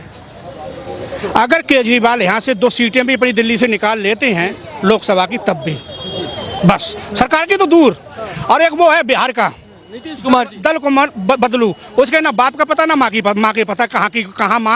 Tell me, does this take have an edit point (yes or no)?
no